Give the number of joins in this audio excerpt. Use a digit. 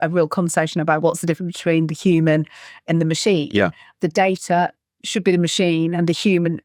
0